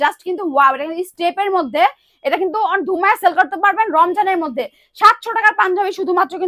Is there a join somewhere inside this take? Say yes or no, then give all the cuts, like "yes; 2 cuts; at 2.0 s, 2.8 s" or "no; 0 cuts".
no; 0 cuts